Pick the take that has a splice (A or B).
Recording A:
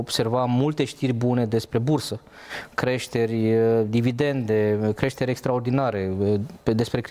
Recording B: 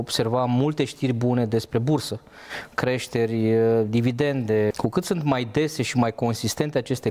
B